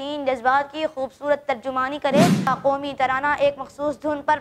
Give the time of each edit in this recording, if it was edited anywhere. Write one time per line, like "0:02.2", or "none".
0:02.5

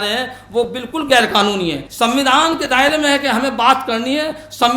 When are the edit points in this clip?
0:01.9

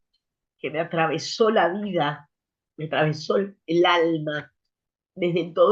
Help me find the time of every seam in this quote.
none

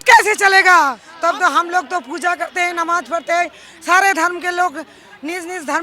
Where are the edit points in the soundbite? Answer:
0:01.0

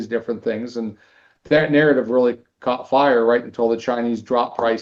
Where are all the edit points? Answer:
none

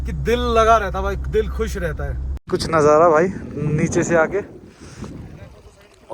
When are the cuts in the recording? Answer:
0:02.4

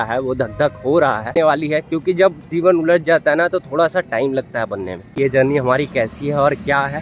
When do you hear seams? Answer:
0:01.7
0:05.1

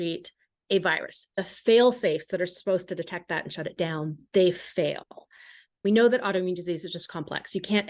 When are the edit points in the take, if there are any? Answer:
0:01.3
0:05.8

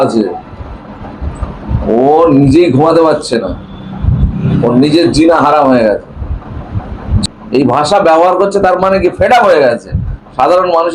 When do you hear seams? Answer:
0:07.2

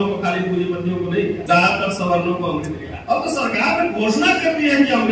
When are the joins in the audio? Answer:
0:01.4
0:02.9

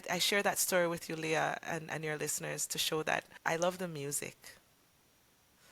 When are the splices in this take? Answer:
0:03.3

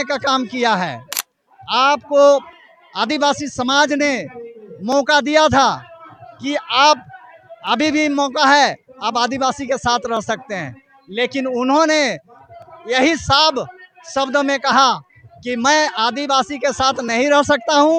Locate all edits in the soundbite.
none

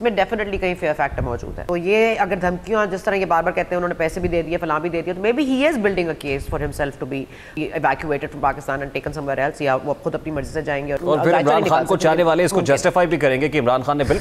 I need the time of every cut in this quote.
0:01.5
0:07.5
0:11.0

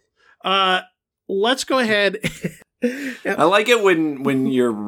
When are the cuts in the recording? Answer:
0:02.5

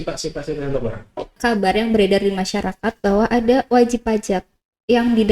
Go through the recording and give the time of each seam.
0:01.4

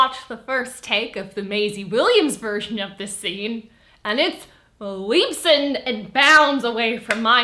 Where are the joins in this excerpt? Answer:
none

